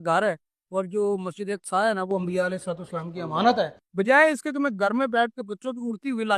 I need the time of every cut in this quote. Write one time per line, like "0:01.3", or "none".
0:03.8